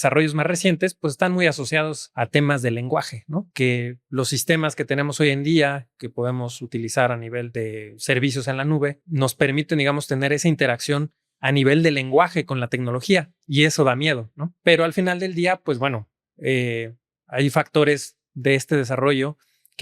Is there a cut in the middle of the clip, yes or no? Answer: yes